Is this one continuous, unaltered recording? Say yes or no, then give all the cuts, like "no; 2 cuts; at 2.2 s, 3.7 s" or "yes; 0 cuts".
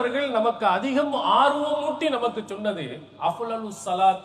yes; 0 cuts